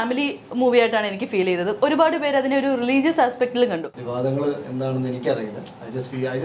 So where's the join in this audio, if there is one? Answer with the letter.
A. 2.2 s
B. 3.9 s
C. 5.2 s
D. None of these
B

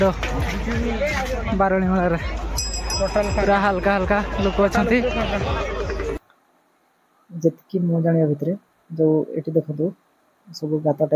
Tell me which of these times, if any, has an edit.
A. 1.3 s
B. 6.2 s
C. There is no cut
B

